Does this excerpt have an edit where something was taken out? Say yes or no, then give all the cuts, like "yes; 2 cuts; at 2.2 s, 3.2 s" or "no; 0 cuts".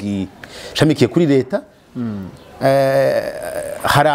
no; 0 cuts